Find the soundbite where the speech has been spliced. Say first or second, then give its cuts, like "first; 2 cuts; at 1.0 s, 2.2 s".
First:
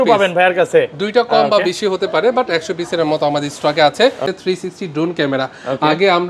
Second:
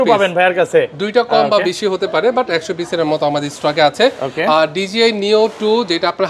first; 1 cut; at 4.3 s